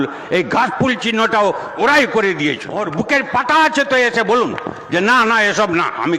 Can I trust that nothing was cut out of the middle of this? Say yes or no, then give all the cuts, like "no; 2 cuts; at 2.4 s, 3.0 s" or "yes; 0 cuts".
no; 1 cut; at 2.7 s